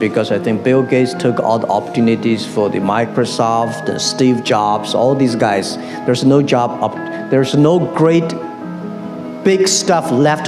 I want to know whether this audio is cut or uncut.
uncut